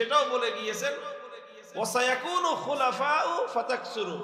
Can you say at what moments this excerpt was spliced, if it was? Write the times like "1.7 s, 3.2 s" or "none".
none

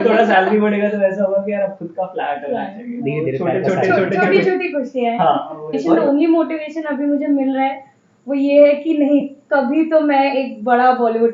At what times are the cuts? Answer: 5.8 s

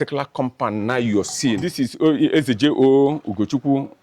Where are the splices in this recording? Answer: 1.7 s

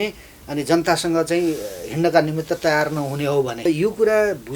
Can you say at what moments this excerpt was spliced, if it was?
3.6 s

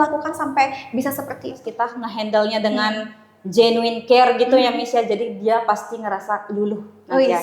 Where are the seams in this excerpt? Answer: 1.7 s

